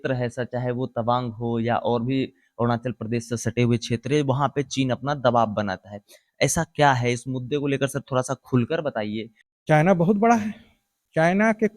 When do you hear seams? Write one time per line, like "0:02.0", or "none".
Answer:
0:09.4